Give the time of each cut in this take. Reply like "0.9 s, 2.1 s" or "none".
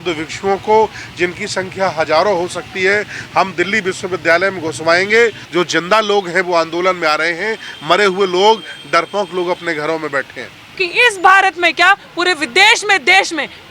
5.4 s, 10.8 s